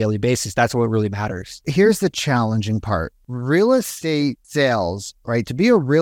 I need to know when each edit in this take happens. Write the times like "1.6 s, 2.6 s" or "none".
1.7 s, 3.2 s, 4.1 s